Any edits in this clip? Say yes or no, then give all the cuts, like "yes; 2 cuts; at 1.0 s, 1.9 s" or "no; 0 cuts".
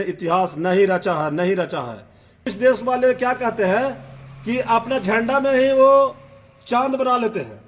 yes; 1 cut; at 2.4 s